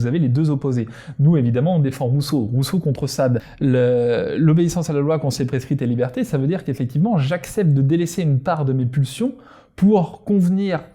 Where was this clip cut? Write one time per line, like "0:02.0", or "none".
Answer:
0:03.5

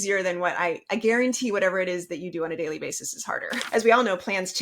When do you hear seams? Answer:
0:03.6

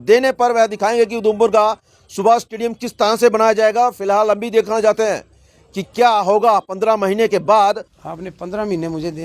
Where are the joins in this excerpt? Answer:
0:07.9

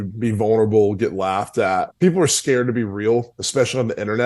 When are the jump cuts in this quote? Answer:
0:01.9

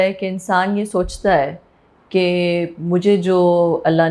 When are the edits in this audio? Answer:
none

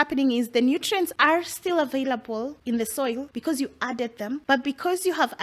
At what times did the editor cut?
0:01.1
0:02.6
0:03.3
0:04.4

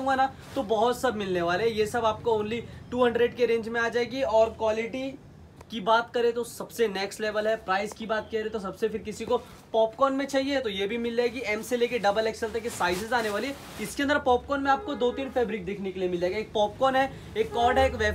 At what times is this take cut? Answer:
none

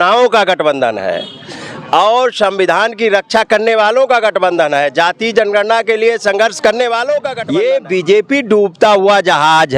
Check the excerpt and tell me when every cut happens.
0:07.3

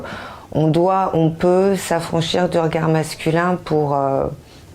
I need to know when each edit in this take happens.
0:03.4

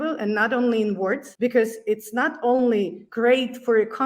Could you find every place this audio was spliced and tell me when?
0:01.3
0:03.0

